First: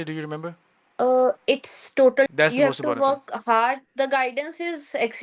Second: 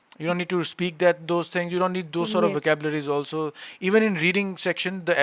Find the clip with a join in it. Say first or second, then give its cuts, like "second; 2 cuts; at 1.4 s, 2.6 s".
first; 1 cut; at 2.3 s